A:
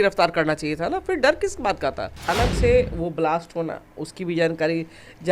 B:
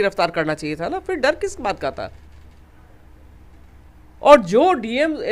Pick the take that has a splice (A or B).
A